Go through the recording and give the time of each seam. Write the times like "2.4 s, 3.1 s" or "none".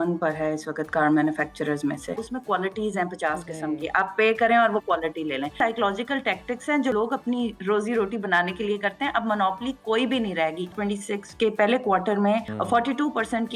2.3 s, 5.6 s, 6.9 s, 10.7 s, 12.5 s